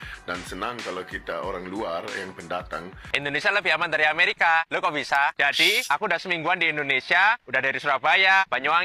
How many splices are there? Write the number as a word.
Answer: one